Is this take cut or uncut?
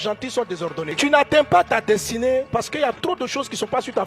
cut